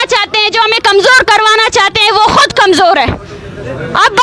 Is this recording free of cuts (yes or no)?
yes